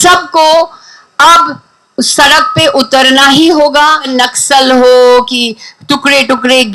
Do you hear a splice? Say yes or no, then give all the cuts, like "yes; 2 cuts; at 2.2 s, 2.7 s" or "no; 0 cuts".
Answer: yes; 1 cut; at 4.1 s